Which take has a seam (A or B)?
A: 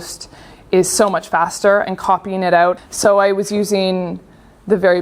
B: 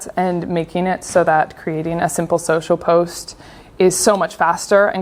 A